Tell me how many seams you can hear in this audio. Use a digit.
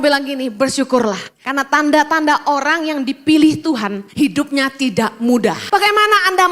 3